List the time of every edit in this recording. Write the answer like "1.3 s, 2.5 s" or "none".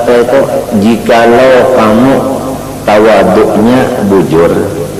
none